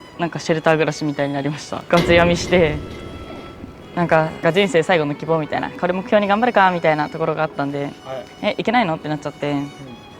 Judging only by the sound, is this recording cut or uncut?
cut